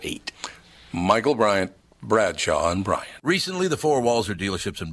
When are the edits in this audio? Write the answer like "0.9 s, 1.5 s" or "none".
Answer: 3.1 s